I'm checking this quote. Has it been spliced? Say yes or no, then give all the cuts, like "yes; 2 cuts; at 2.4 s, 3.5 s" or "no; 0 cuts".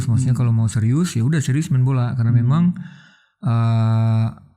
no; 0 cuts